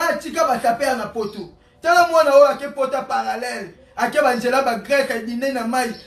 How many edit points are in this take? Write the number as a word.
zero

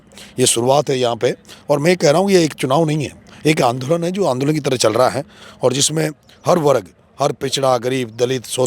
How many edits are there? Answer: zero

